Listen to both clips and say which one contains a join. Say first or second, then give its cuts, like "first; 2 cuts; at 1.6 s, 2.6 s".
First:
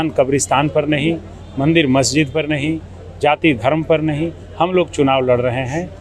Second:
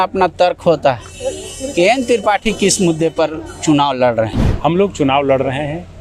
second; 1 cut; at 4.4 s